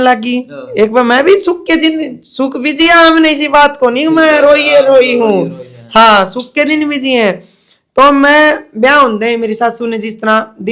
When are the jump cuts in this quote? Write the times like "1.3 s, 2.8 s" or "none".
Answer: none